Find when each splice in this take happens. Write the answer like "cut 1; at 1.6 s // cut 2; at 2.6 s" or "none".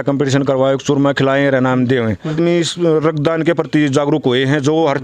cut 1; at 2.3 s